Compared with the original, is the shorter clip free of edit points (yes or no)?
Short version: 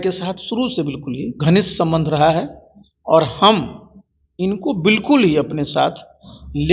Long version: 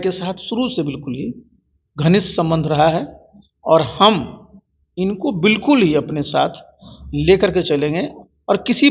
no